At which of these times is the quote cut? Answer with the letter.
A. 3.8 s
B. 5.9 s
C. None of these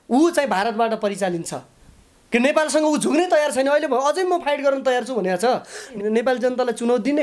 B